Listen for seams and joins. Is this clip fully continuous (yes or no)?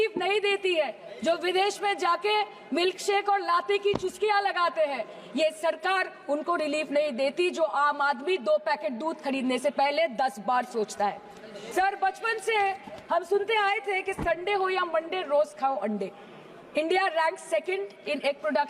yes